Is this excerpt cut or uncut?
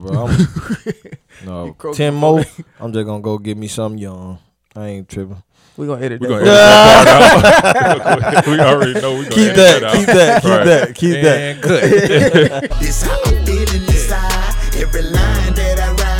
cut